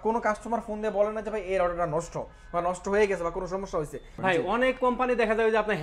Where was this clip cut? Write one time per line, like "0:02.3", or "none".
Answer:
0:04.1